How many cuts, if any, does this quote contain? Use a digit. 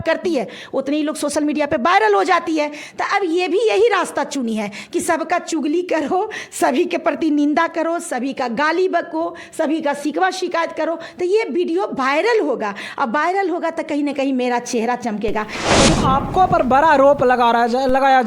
1